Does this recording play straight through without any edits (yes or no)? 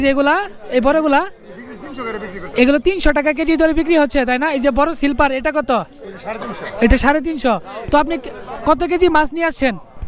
yes